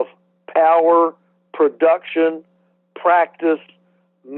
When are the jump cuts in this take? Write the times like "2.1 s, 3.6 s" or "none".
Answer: none